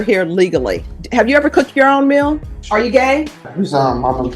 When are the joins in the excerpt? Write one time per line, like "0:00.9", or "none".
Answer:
0:00.9
0:02.5
0:03.5